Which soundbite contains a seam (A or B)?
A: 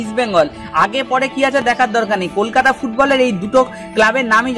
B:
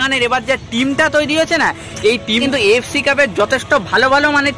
B